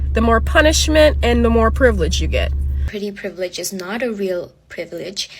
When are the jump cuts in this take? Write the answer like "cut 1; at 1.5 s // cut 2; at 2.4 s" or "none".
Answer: cut 1; at 2.9 s